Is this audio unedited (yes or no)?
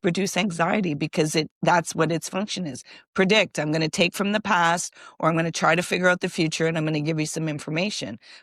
yes